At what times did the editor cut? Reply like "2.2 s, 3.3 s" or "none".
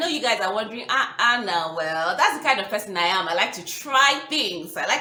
none

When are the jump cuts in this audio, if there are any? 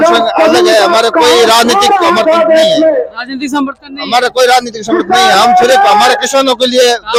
none

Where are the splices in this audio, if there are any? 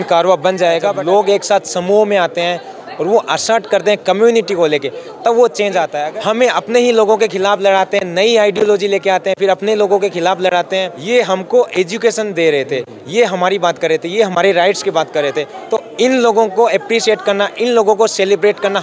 0.9 s, 6.0 s, 10.9 s

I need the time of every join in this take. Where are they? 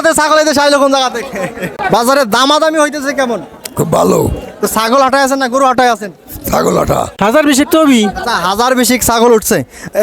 1.7 s, 7.2 s

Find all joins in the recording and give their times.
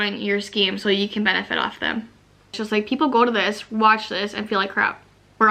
2.6 s

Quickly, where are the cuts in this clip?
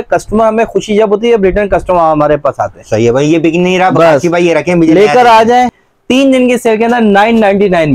5.8 s

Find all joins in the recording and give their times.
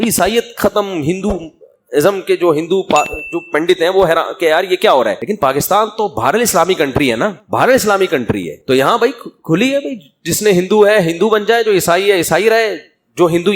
5.2 s, 7.4 s

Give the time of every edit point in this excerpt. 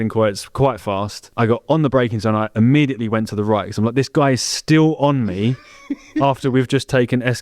1.2 s

